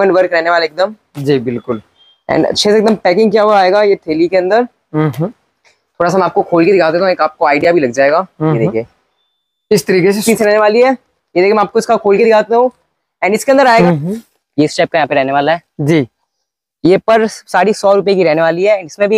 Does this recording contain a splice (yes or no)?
yes